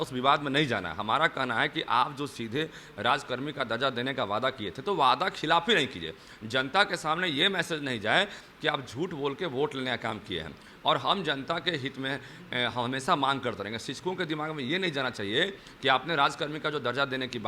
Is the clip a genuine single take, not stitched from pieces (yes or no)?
yes